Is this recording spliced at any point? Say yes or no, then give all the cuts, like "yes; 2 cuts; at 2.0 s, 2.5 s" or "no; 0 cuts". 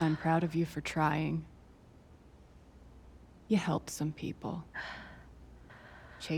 yes; 2 cuts; at 1.9 s, 3.5 s